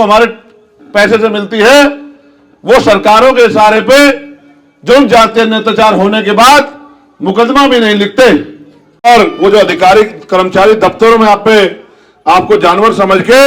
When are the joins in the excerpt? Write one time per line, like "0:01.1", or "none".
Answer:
0:09.0